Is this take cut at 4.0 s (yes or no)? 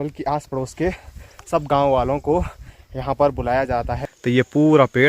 yes